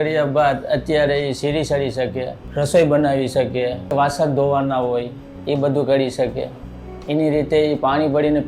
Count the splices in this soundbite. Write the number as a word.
two